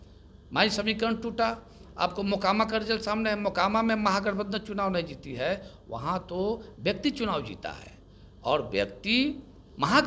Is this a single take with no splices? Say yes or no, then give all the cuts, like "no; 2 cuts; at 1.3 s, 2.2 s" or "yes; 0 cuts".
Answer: yes; 0 cuts